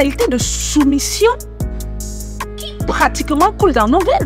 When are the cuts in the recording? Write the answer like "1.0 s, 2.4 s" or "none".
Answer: none